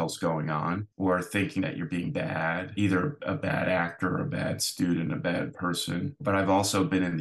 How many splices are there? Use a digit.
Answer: 3